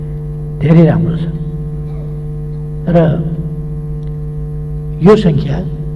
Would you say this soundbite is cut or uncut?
uncut